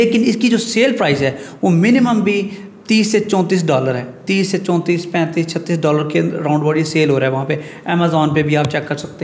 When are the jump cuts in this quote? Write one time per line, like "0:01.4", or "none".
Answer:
none